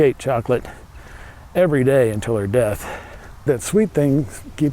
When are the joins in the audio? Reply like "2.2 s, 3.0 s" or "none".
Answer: 3.4 s